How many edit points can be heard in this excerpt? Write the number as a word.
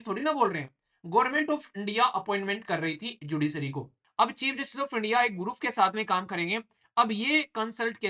one